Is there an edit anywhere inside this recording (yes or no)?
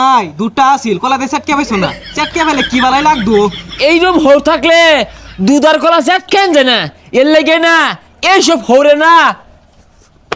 no